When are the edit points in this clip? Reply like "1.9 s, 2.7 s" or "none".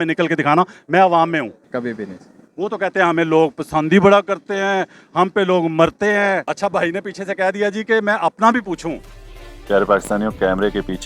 1.6 s, 6.5 s